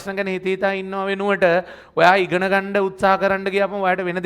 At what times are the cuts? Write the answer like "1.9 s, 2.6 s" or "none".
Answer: none